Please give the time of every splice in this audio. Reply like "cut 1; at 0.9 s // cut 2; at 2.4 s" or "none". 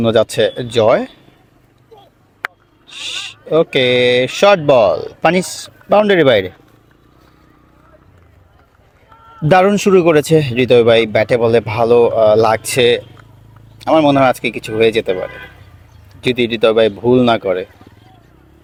none